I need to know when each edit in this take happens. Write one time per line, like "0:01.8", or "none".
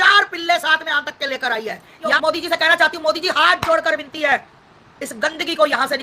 0:02.2